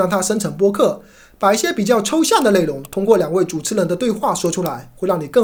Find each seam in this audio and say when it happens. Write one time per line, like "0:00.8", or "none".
none